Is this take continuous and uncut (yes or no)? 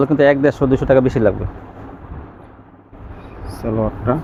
yes